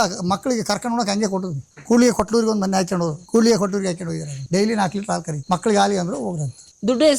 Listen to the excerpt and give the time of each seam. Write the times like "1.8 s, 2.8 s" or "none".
3.2 s, 4.3 s, 5.3 s